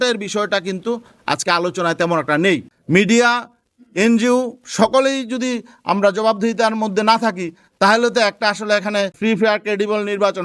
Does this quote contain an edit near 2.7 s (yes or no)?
yes